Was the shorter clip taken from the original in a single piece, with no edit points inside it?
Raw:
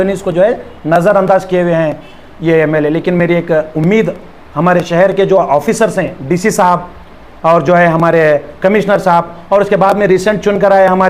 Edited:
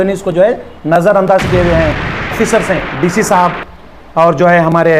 no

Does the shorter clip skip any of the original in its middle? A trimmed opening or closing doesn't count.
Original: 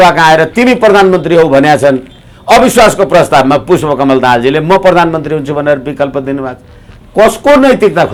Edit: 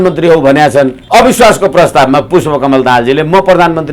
yes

